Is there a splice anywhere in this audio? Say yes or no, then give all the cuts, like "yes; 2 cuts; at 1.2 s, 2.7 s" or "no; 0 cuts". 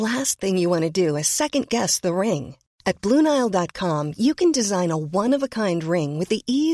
no; 0 cuts